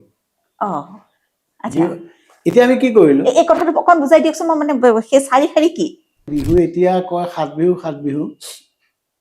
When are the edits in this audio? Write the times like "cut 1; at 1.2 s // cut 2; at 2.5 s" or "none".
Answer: cut 1; at 6.2 s